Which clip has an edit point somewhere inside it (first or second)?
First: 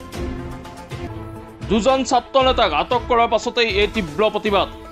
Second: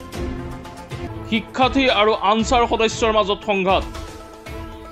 second